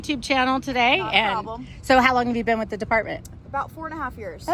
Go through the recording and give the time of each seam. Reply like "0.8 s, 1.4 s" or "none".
none